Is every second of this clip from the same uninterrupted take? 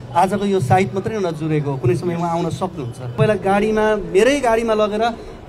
no; 1 cut; at 3.2 s

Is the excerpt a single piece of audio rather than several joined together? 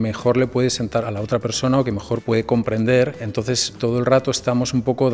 no; 3 cuts; at 1.0 s, 2.2 s, 3.7 s

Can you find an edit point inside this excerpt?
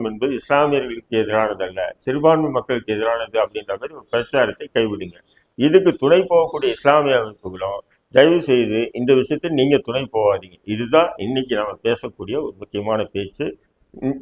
no; 0 cuts

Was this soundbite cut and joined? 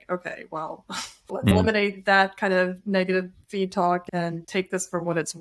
yes; 2 cuts; at 1.5 s, 4.0 s

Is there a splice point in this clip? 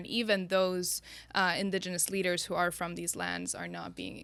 no; 0 cuts

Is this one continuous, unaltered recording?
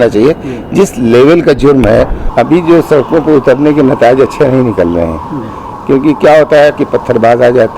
no; 1 cut; at 2.2 s

